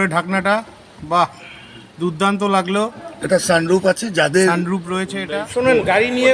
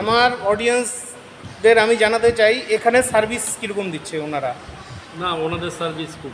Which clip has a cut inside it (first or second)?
first